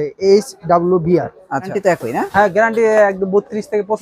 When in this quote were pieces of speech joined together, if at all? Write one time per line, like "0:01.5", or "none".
0:01.7